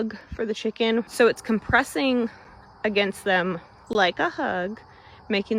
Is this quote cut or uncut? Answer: cut